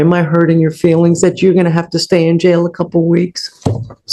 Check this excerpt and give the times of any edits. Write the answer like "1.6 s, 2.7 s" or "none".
none

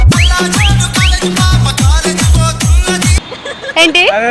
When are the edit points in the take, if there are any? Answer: 3.1 s

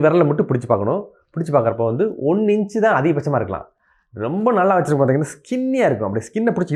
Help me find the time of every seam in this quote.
none

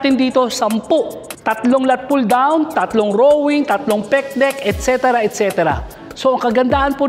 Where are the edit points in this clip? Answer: 1.2 s

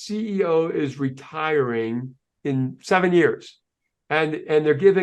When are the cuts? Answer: none

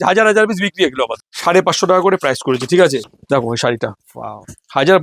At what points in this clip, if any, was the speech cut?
1.2 s, 3.0 s

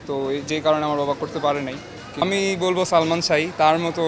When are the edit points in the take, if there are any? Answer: 2.2 s

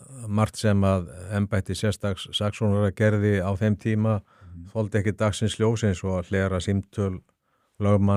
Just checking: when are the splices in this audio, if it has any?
none

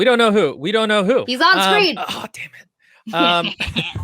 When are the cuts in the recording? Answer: 1.3 s, 2.0 s

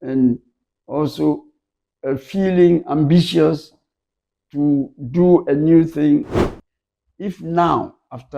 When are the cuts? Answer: 6.4 s

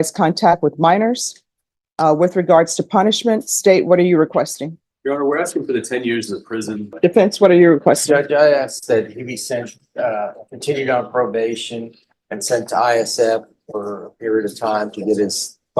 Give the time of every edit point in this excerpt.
6.9 s

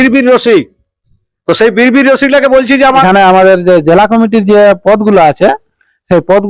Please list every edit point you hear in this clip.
3.0 s

